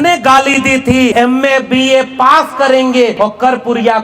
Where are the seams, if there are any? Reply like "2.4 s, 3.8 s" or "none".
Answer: 1.1 s, 3.1 s

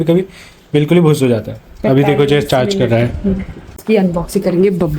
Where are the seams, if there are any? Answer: 3.8 s

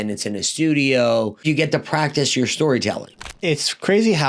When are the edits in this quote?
1.4 s, 3.4 s

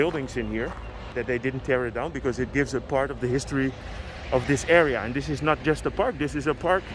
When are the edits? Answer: 1.1 s

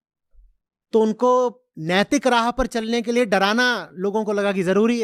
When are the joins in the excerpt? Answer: none

